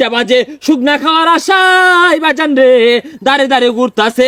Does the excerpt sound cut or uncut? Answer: uncut